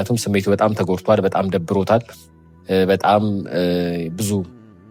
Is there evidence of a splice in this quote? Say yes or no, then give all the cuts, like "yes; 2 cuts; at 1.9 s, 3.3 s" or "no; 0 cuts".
no; 0 cuts